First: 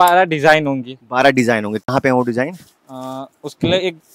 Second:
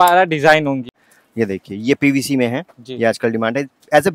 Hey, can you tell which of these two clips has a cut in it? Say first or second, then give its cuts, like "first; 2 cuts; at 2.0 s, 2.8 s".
second; 1 cut; at 1.0 s